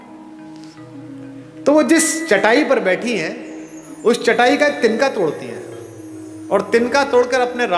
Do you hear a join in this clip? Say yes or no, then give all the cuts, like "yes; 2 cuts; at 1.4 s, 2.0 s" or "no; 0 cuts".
no; 0 cuts